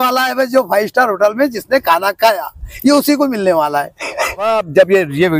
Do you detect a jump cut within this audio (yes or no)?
yes